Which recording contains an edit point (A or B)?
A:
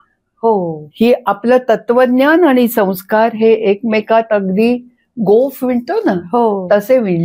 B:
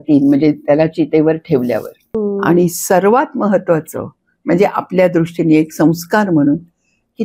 B